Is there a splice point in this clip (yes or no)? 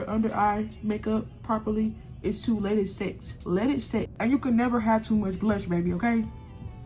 yes